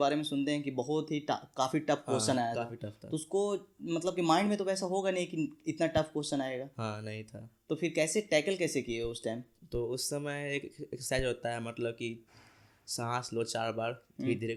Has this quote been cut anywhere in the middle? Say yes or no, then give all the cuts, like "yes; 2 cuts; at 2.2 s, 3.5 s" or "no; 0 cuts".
no; 0 cuts